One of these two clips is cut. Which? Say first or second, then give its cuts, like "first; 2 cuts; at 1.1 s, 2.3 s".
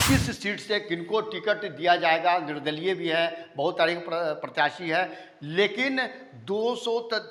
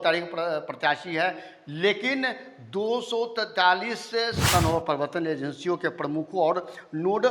second; 1 cut; at 4.5 s